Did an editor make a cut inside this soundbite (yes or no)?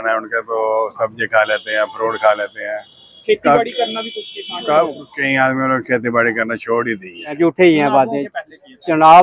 yes